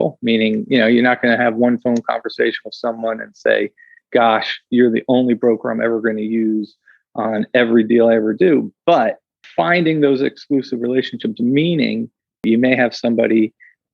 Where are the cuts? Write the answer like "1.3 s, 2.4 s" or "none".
12.4 s